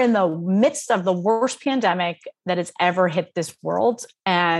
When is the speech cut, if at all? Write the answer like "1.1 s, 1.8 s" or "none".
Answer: none